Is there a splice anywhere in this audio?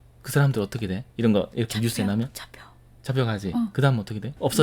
no; 0 cuts

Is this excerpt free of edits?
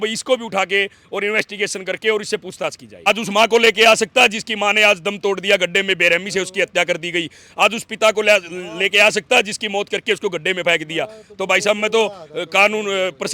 no; 1 cut; at 3.0 s

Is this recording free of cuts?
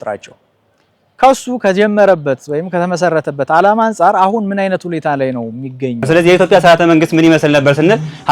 no; 1 cut; at 6.0 s

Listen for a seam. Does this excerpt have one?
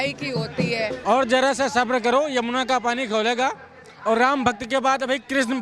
yes; 1 cut; at 0.9 s

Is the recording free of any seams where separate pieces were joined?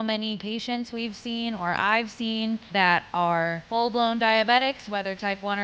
no; 2 cuts; at 2.6 s, 3.6 s

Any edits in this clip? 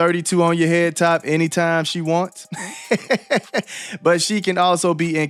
no; 0 cuts

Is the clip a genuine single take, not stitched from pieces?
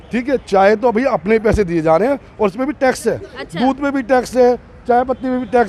yes; 0 cuts

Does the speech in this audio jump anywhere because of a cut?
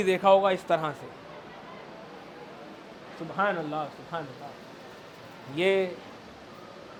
no; 0 cuts

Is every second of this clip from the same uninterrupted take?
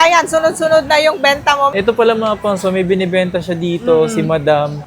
no; 1 cut; at 1.7 s

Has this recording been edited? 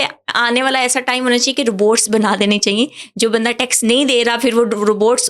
no; 0 cuts

